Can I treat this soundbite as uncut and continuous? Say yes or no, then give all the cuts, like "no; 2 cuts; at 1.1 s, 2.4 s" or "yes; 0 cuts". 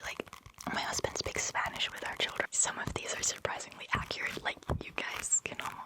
no; 1 cut; at 2.5 s